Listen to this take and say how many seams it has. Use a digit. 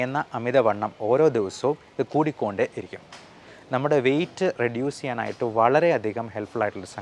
1